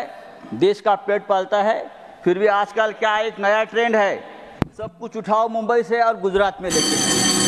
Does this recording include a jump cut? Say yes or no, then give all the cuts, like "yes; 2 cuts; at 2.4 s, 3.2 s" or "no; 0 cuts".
no; 0 cuts